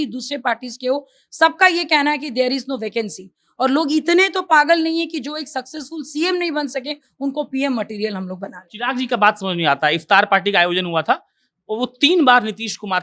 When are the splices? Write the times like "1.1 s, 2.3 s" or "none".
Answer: none